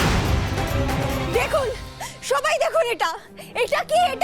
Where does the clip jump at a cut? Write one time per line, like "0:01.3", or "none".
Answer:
0:01.2